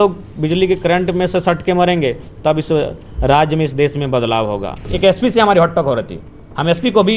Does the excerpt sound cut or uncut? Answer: cut